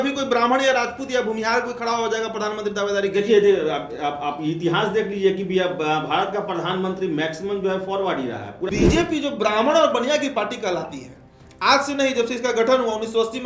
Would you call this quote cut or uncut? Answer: cut